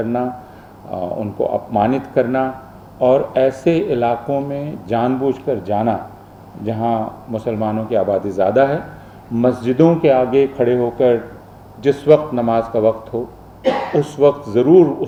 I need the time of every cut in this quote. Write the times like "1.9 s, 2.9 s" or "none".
none